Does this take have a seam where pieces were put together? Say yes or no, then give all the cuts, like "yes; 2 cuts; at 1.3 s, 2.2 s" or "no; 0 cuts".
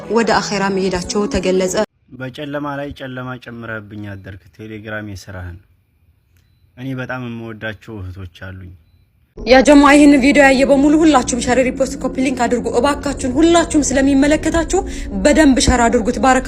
yes; 2 cuts; at 1.9 s, 9.2 s